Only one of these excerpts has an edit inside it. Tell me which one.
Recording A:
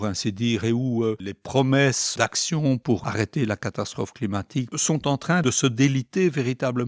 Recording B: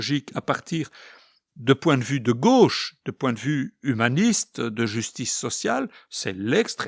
A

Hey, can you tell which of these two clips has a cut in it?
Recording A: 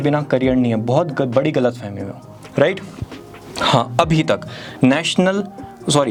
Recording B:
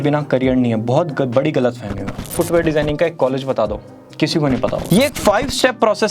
B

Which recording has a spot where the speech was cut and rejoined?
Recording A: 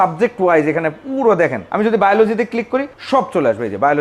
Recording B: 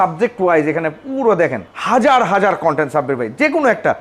A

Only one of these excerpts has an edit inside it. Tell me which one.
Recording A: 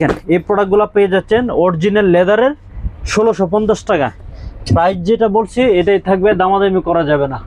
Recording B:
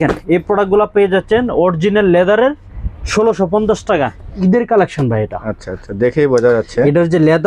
B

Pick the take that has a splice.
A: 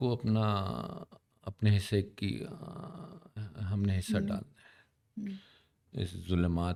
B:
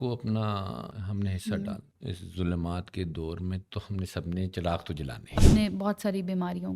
B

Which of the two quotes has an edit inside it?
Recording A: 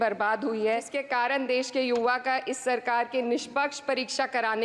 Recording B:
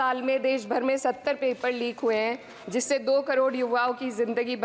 A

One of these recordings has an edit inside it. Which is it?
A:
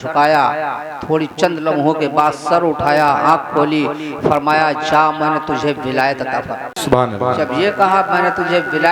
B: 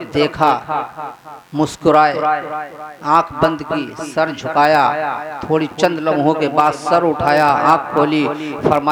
A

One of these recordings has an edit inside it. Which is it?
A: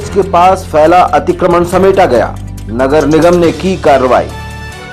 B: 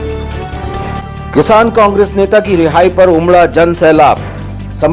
B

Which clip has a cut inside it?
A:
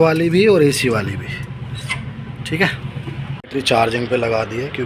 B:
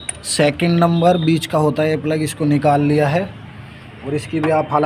A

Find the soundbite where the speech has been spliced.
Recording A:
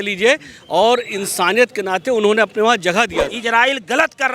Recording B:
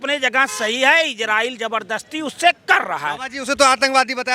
A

